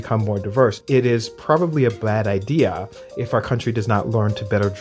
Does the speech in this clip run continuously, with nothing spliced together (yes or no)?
yes